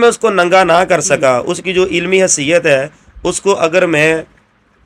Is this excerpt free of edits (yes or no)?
yes